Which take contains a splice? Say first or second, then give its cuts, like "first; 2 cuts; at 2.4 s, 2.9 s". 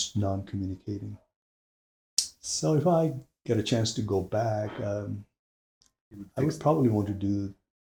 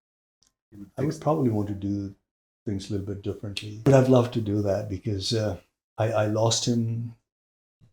second; 1 cut; at 3.9 s